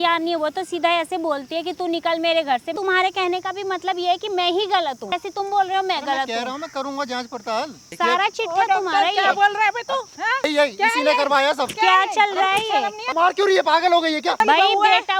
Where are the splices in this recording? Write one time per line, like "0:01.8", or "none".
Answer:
0:02.7
0:05.2
0:07.8
0:10.5
0:13.1
0:14.4